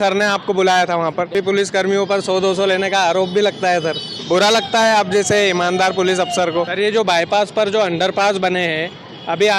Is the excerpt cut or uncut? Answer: cut